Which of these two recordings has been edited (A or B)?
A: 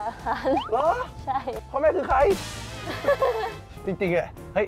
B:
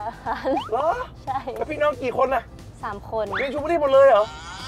A